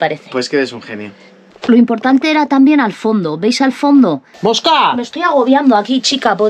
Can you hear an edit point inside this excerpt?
yes; 2 cuts; at 1.6 s, 4.3 s

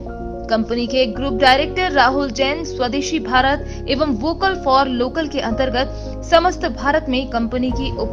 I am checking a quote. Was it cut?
no; 0 cuts

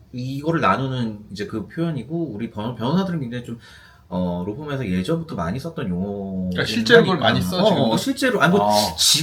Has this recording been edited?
no; 0 cuts

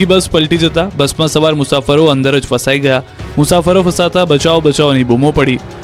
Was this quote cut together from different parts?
no; 0 cuts

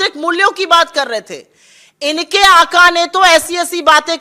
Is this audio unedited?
yes; 0 cuts

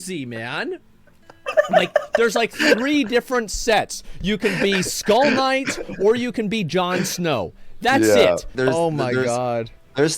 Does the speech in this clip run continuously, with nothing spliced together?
no; 1 cut; at 8.5 s

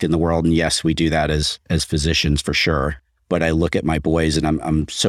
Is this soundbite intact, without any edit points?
yes; 0 cuts

